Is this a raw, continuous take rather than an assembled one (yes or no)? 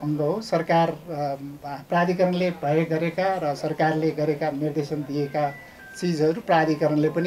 yes